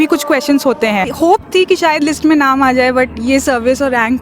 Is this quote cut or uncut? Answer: cut